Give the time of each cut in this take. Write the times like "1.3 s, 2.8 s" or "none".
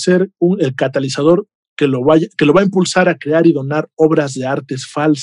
none

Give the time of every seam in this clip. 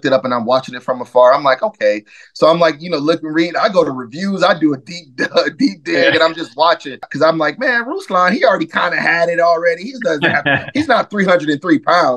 7.1 s

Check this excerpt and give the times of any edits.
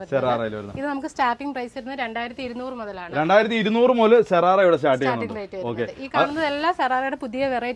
none

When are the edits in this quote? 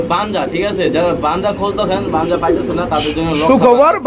none

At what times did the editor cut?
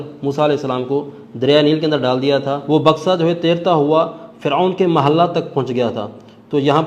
2.6 s

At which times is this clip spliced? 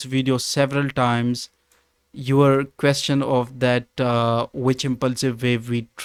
none

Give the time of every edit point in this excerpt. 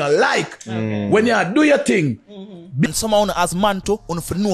2.9 s

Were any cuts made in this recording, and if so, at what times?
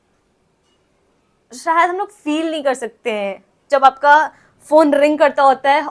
3.6 s

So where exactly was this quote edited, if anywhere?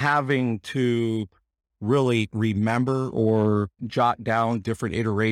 none

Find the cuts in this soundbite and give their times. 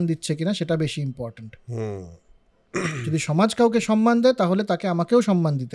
none

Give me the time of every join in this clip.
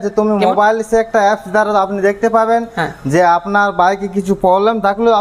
none

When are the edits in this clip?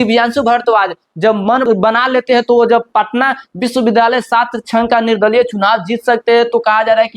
1.7 s

